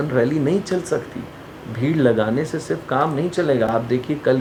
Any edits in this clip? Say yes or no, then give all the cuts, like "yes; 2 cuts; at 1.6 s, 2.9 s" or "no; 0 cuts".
no; 0 cuts